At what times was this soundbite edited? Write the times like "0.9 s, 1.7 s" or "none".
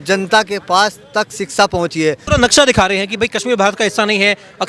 2.2 s